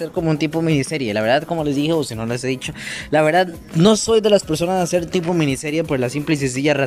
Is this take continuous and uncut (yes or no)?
yes